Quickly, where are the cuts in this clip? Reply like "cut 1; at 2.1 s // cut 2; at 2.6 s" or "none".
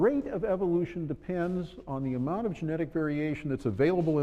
cut 1; at 1.6 s